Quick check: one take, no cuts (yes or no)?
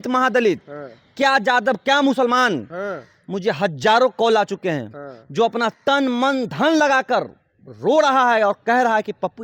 yes